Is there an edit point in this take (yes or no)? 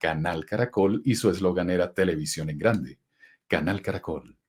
no